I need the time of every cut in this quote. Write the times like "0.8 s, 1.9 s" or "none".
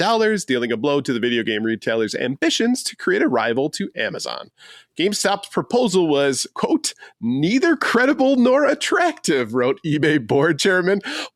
none

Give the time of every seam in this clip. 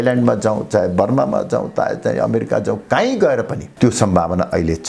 none

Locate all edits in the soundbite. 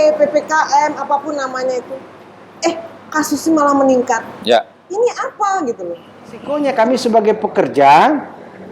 6.5 s

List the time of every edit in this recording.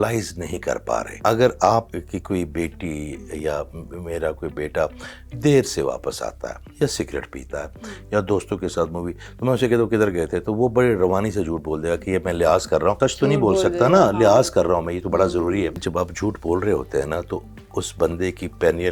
1.1 s, 2.0 s, 13.0 s, 15.8 s

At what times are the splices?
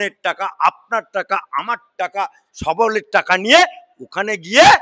none

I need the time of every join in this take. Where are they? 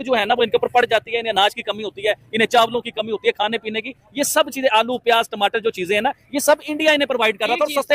none

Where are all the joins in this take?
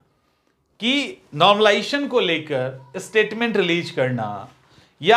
none

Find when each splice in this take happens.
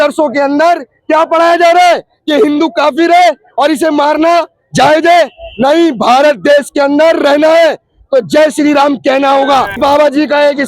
9.8 s

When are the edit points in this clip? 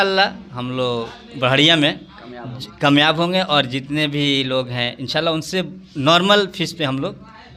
none

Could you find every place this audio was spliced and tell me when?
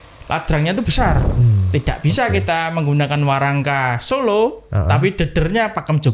1.3 s

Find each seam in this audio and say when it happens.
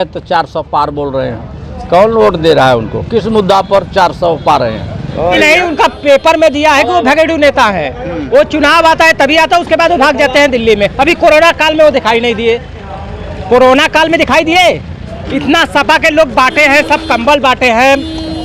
5.4 s

